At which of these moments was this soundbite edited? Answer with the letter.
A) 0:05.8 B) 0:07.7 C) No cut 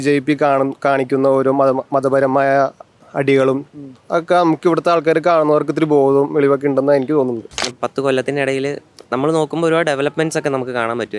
B